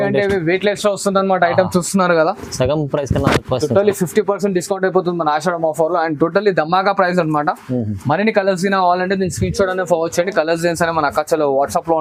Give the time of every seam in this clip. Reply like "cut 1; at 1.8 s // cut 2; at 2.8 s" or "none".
none